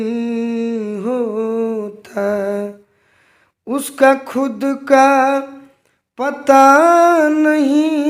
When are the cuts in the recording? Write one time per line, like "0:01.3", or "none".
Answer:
none